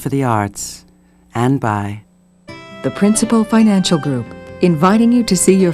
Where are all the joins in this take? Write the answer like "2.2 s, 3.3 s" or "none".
2.0 s